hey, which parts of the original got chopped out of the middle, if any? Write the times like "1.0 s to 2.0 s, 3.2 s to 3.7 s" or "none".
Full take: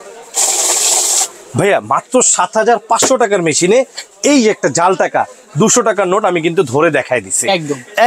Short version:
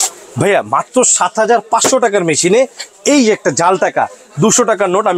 none